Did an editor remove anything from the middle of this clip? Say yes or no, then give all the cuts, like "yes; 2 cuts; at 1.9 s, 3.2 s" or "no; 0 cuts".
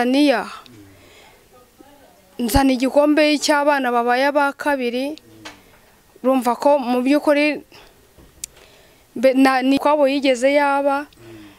yes; 1 cut; at 9.8 s